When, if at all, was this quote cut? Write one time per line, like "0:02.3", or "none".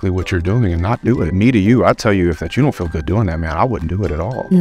0:01.3